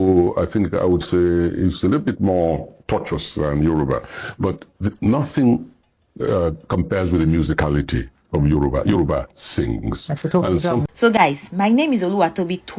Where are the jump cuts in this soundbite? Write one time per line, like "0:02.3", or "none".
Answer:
0:10.8